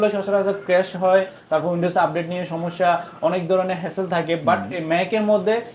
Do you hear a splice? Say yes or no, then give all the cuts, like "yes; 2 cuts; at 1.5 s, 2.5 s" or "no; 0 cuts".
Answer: no; 0 cuts